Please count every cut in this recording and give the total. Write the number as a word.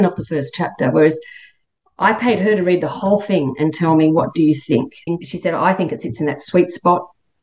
one